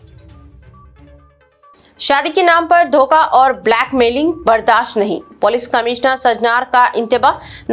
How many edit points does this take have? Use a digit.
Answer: 1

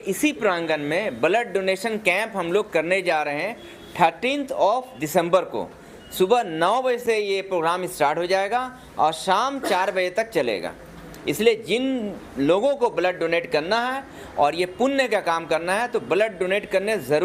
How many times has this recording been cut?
0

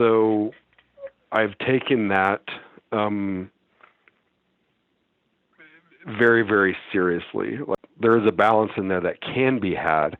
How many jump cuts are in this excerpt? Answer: 1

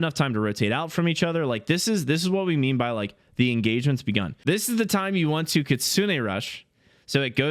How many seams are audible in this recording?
1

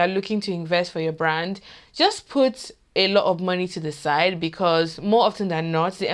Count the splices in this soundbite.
0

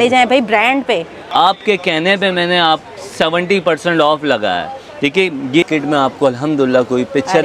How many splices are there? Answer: 2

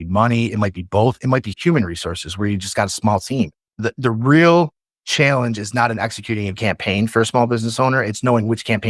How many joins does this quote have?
1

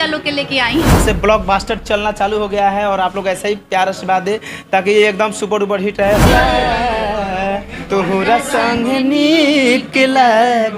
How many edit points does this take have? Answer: 2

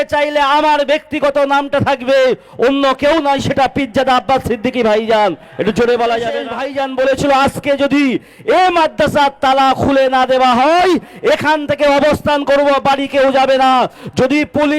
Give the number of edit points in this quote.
1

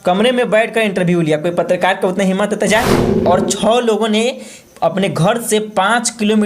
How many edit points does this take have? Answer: 1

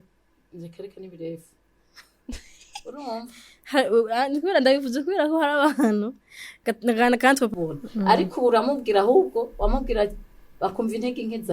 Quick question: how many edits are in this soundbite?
1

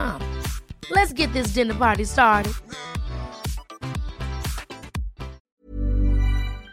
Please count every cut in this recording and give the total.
1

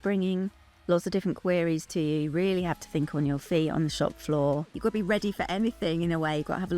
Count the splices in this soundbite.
1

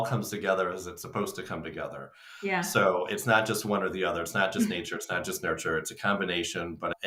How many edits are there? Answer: 0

